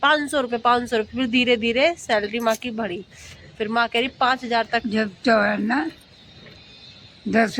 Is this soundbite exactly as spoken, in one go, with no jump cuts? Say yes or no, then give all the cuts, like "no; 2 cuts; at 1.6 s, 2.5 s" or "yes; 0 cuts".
yes; 0 cuts